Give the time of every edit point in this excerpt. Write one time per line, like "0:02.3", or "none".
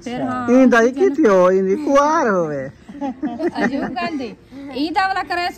none